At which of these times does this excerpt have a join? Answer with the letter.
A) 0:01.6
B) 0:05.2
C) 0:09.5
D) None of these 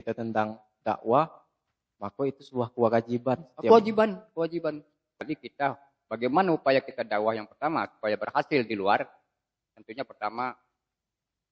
B